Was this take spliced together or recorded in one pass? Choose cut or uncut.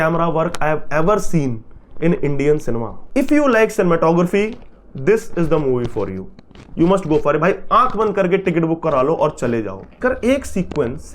cut